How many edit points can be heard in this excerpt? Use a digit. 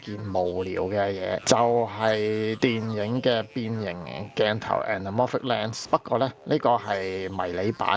0